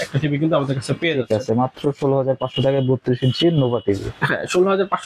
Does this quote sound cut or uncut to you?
uncut